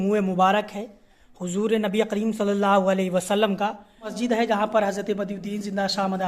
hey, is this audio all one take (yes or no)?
no